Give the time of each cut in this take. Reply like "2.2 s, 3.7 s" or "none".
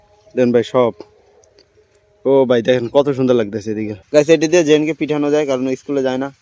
3.9 s

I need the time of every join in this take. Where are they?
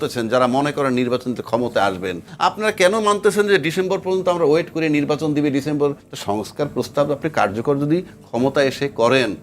2.3 s, 6.0 s

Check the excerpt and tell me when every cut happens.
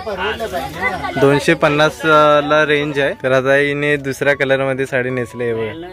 3.2 s

